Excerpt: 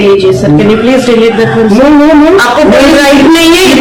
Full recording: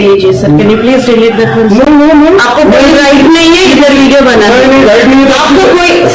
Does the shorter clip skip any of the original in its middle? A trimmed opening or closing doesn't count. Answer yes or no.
no